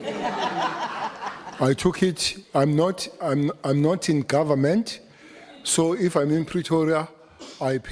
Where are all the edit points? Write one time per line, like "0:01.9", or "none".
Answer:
none